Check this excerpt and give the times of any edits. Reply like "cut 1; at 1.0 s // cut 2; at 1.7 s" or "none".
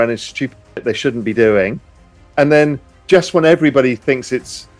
cut 1; at 2.9 s

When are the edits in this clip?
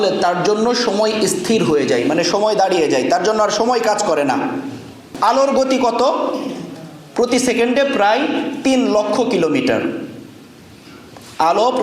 cut 1; at 5.1 s

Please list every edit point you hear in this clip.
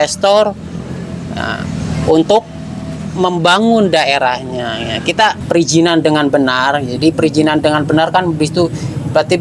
cut 1; at 5.4 s

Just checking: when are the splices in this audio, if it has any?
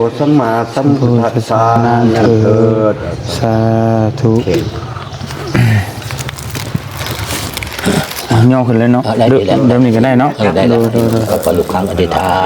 cut 1; at 1.8 s

